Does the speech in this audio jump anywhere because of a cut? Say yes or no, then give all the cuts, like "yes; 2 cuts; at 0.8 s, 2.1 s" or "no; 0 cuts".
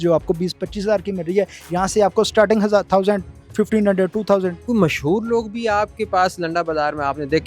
yes; 1 cut; at 4.6 s